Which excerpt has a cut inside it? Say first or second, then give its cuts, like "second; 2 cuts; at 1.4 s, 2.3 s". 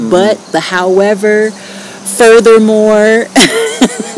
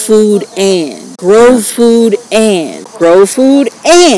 second; 2 cuts; at 1.1 s, 2.8 s